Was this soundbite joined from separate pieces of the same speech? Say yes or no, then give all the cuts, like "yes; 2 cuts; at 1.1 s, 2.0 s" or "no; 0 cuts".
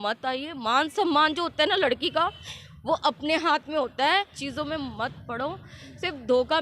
yes; 1 cut; at 4.4 s